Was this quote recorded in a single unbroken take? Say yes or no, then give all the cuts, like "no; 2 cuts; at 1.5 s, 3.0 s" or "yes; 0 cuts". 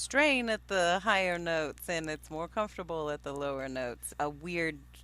no; 1 cut; at 4.0 s